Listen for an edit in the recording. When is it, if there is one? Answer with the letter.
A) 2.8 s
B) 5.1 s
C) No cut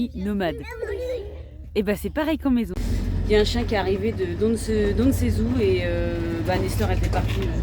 A